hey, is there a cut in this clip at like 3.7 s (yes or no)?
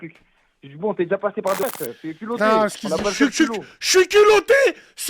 no